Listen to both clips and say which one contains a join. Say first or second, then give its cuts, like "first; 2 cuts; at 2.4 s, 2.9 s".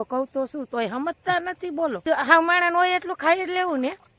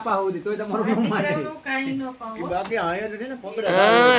first; 1 cut; at 2.0 s